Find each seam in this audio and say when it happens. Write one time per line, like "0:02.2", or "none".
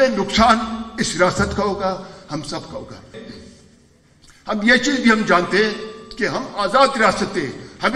0:03.1